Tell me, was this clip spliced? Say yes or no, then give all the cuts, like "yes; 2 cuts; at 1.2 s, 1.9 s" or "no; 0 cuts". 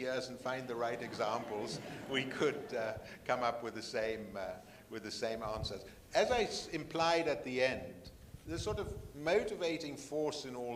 no; 0 cuts